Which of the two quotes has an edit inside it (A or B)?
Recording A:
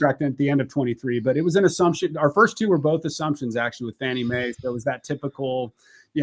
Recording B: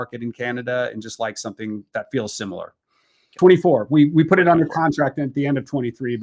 B